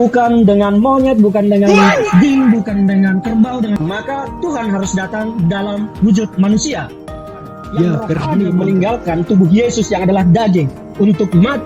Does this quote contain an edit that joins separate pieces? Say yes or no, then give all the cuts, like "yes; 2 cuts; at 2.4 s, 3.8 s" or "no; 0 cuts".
yes; 2 cuts; at 3.8 s, 8.3 s